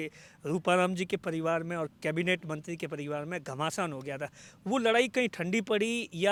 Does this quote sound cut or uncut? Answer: uncut